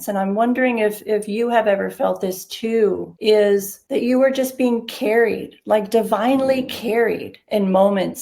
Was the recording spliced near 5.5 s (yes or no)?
no